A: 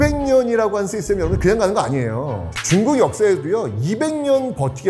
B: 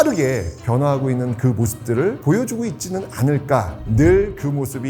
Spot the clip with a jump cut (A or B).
B